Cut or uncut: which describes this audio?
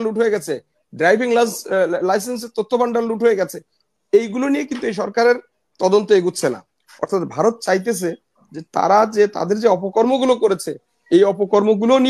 uncut